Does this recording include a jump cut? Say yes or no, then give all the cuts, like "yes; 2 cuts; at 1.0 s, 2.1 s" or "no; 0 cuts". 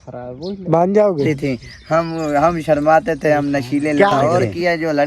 yes; 2 cuts; at 1.2 s, 4.2 s